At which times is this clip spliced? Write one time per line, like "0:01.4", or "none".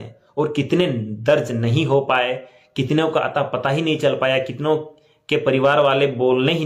none